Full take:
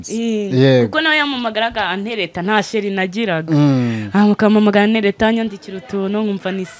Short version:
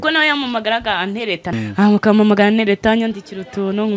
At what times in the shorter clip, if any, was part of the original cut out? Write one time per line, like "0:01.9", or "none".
0:01.5